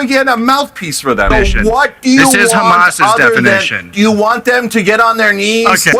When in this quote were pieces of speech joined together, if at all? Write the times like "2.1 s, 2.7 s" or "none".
1.3 s